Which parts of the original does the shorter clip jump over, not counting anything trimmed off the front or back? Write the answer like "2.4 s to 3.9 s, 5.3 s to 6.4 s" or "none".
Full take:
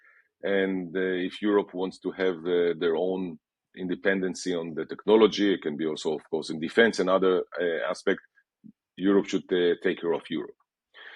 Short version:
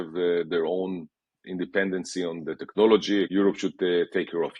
5.6 s to 9.0 s